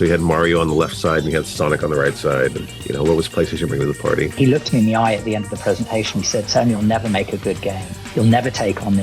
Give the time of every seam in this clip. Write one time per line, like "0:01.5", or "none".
0:04.4
0:08.0